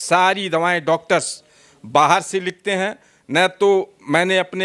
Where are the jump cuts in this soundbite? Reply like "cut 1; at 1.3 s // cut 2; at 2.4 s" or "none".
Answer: none